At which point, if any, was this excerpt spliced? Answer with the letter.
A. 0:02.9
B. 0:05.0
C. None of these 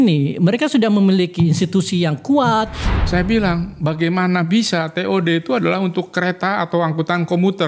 A